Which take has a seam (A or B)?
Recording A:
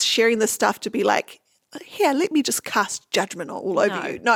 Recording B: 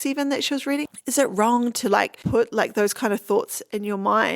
B